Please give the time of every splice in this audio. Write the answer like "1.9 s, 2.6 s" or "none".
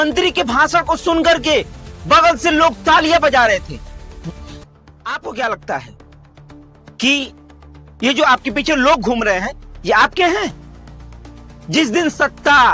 4.6 s